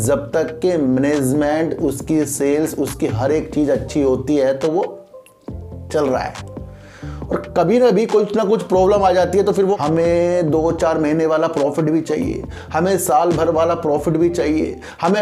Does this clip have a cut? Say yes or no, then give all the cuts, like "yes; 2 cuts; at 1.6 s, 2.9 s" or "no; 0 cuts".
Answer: yes; 1 cut; at 9.8 s